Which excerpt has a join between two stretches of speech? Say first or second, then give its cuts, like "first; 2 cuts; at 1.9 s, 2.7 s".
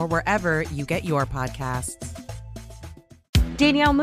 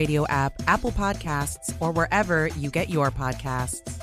first; 1 cut; at 3.1 s